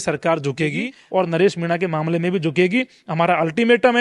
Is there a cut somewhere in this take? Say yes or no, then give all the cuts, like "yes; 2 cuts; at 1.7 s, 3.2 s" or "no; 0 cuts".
yes; 1 cut; at 0.9 s